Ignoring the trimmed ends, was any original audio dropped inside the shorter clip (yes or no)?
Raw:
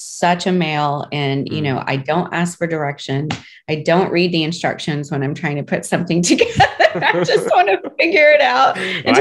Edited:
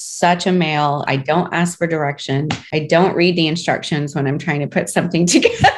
yes